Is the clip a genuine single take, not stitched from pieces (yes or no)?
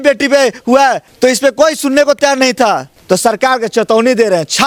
yes